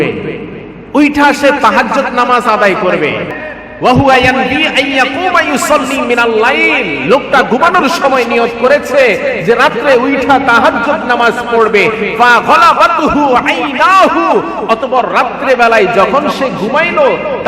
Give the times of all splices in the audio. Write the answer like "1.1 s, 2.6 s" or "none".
3.3 s